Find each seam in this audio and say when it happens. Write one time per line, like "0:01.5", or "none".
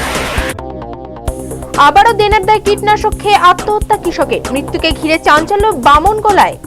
none